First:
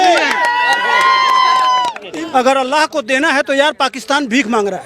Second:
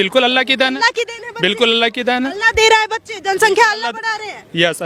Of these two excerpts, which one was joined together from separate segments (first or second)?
first